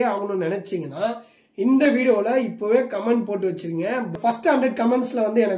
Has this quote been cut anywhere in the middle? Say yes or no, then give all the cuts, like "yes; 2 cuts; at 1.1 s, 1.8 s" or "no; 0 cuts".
yes; 1 cut; at 4.2 s